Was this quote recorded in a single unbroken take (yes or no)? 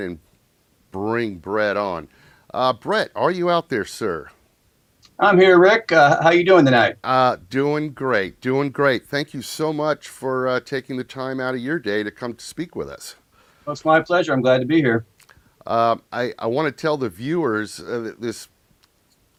yes